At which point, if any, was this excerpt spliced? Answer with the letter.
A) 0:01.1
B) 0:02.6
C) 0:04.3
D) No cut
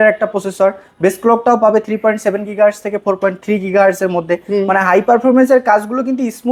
D